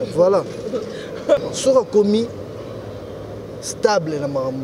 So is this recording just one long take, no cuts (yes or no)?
no